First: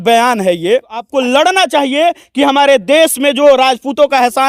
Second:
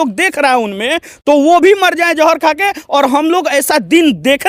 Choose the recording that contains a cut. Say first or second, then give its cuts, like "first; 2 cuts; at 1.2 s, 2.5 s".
first; 1 cut; at 1.1 s